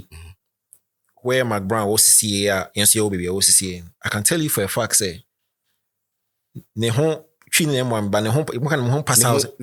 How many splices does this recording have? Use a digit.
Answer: 0